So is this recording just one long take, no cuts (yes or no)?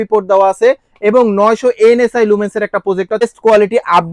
no